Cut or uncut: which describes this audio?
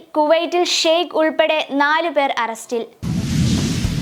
cut